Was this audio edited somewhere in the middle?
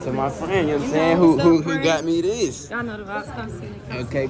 no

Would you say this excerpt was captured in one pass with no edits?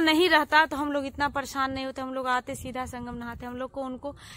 yes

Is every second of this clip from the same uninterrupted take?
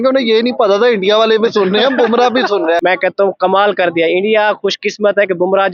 no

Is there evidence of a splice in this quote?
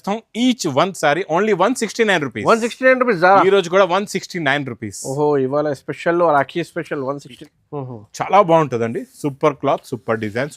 yes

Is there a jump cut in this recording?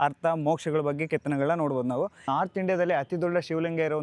yes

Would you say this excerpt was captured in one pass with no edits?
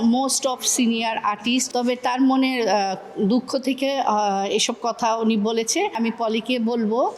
no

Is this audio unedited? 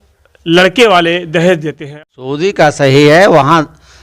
no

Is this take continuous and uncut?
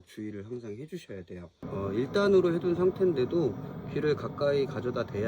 no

